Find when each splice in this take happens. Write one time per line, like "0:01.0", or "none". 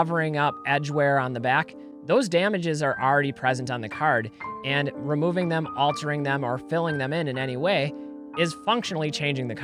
0:08.6

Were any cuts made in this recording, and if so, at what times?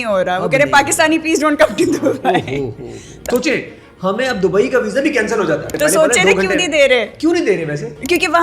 0:03.2
0:05.7

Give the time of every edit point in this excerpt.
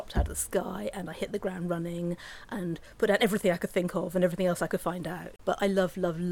0:05.3

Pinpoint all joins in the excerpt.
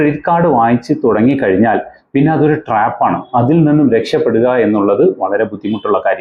none

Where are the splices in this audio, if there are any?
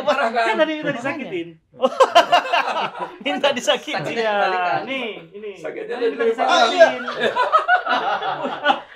none

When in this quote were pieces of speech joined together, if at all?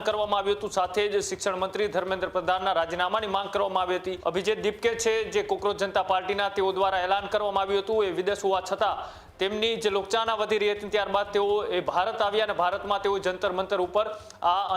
0:04.1

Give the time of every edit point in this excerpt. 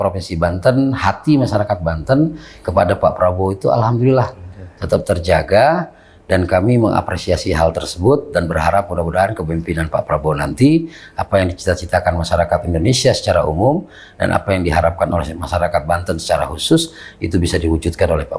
none

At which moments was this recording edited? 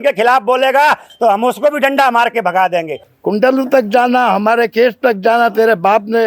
0:01.1
0:03.0

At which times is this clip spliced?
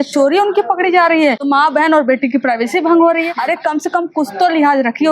0:01.4
0:03.4

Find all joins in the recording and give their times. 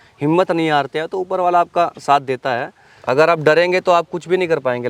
0:02.7

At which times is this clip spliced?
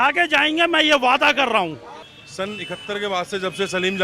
none

